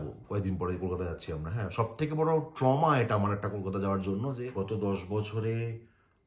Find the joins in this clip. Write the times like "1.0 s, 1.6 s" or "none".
4.4 s